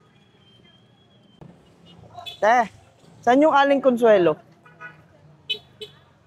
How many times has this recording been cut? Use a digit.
1